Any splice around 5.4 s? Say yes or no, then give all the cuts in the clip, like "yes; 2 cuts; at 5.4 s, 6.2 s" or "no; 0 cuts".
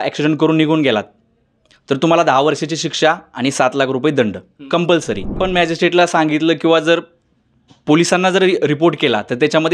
yes; 1 cut; at 5.4 s